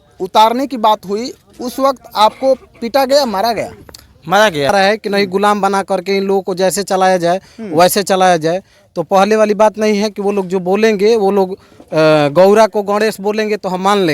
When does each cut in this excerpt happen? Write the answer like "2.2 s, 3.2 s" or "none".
4.7 s